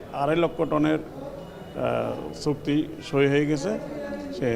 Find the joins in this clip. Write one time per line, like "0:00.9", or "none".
none